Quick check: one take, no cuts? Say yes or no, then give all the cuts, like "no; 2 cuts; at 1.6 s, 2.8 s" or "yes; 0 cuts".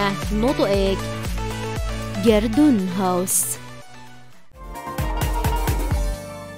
no; 1 cut; at 4.7 s